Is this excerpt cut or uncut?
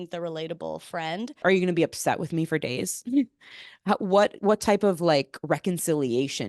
cut